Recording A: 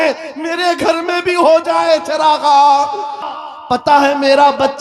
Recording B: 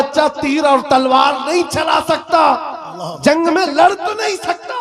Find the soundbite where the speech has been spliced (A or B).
A